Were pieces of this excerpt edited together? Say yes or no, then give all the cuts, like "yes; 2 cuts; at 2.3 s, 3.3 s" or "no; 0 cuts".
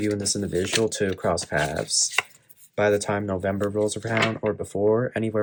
no; 0 cuts